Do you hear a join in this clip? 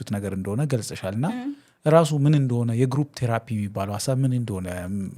no; 0 cuts

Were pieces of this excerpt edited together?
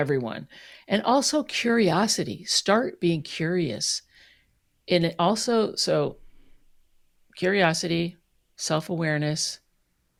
no; 0 cuts

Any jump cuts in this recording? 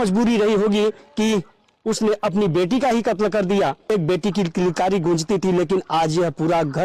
yes; 1 cut; at 3.9 s

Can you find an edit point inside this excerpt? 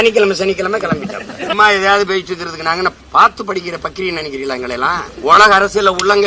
yes; 3 cuts; at 1.5 s, 3.0 s, 5.1 s

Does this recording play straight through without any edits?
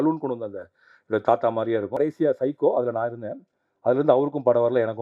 no; 1 cut; at 2.0 s

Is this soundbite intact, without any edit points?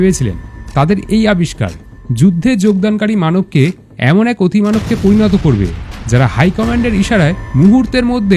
yes; 0 cuts

